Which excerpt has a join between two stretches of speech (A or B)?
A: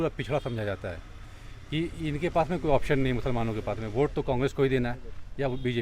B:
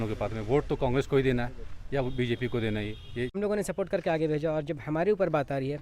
B